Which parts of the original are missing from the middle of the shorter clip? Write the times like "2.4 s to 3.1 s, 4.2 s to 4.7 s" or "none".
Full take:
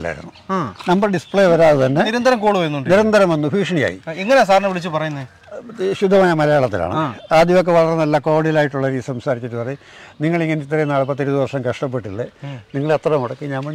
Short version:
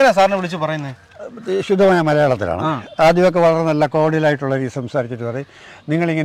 none